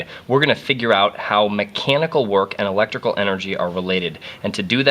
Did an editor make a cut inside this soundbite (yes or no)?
no